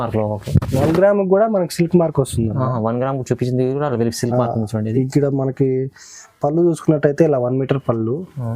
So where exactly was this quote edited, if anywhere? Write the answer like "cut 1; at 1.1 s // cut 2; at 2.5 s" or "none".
none